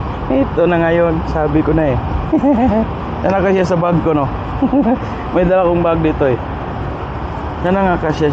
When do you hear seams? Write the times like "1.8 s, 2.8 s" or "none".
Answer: none